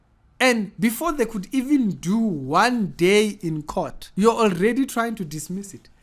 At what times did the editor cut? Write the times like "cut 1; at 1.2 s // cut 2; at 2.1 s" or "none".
cut 1; at 4.0 s